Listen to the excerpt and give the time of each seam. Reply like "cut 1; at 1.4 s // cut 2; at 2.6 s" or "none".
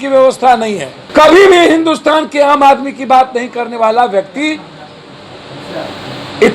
cut 1; at 0.9 s